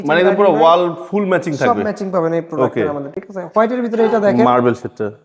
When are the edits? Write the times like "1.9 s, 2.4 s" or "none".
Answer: none